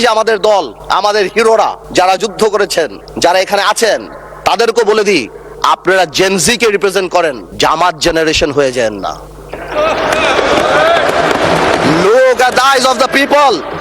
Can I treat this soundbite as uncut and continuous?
yes; 0 cuts

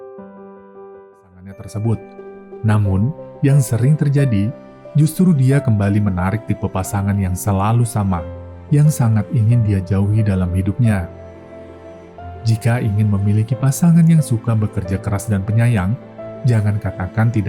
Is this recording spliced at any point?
yes; 1 cut; at 1.6 s

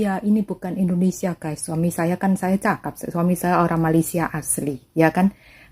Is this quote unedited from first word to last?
yes; 0 cuts

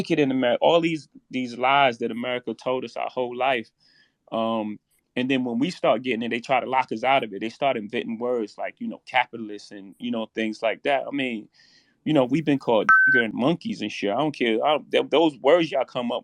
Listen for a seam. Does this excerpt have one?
no; 0 cuts

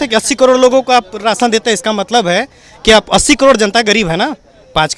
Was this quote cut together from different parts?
no; 0 cuts

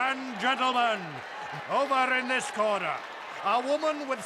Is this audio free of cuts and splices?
no; 1 cut; at 1.6 s

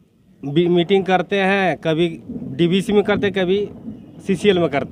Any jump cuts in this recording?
no; 0 cuts

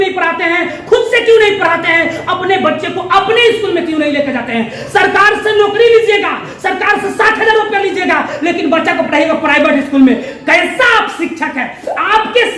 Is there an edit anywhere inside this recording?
no; 0 cuts

